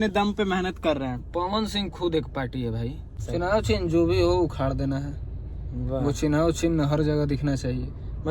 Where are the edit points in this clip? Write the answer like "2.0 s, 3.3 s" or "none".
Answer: 3.2 s